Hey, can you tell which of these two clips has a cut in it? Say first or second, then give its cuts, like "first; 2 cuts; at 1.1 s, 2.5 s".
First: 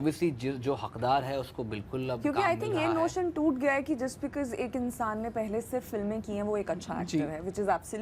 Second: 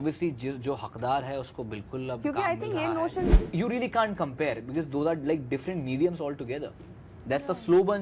second; 1 cut; at 3.3 s